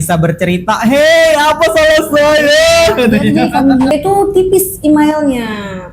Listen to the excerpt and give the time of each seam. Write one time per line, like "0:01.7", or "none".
0:03.9